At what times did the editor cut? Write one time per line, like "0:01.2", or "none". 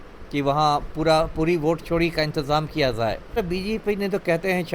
0:03.4